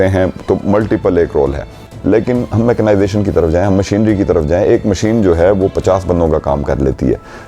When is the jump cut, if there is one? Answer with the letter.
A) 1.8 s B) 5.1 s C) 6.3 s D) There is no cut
A